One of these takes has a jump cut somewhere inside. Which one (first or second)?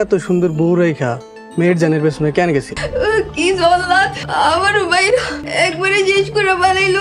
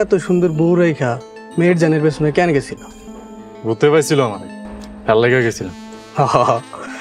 first